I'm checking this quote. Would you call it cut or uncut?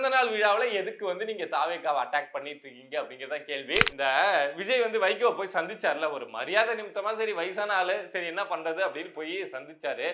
cut